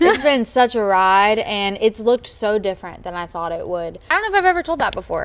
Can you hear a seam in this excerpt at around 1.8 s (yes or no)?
no